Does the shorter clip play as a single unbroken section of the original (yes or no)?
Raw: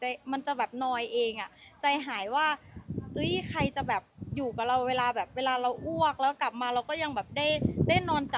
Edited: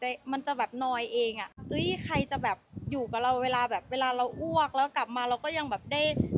no